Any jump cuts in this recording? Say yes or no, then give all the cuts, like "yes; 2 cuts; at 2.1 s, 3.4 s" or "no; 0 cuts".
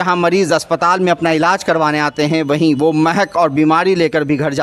no; 0 cuts